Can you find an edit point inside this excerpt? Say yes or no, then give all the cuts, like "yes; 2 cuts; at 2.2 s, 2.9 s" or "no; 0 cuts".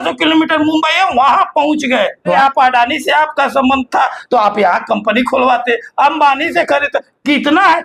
yes; 1 cut; at 2.4 s